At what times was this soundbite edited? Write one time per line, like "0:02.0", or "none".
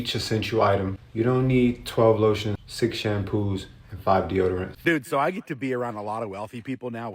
0:04.7